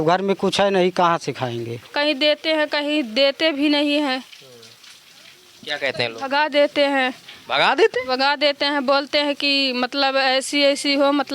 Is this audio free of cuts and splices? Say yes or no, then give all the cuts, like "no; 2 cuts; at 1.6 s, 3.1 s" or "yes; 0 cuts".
no; 1 cut; at 1.8 s